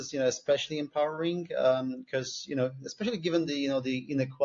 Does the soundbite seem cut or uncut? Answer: uncut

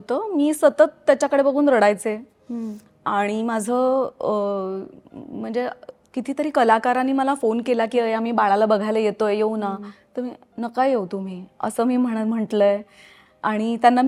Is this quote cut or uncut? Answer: uncut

